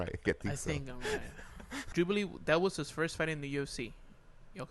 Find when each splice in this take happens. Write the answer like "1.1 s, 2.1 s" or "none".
1.8 s